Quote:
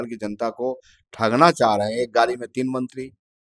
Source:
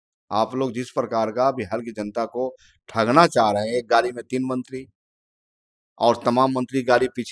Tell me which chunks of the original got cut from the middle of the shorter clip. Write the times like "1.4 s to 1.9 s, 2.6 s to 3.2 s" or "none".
none